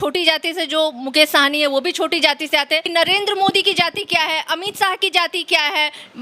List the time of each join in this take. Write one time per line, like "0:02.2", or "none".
0:02.9